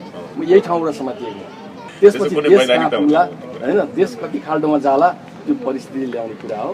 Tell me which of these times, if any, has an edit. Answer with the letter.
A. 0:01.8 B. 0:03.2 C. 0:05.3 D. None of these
A